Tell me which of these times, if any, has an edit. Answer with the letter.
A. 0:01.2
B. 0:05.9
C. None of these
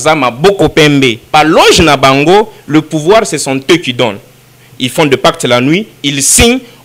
A